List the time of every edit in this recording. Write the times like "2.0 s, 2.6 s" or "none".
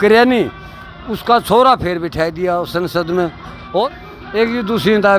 3.8 s